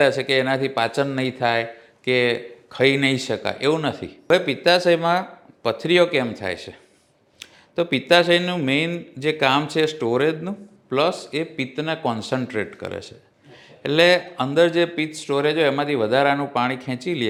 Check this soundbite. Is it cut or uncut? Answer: uncut